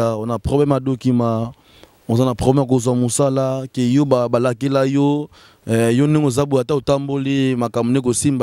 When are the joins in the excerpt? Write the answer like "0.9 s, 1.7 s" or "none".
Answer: none